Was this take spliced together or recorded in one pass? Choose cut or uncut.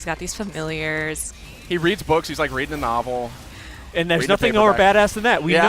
cut